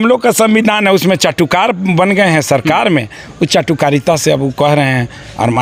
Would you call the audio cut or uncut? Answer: uncut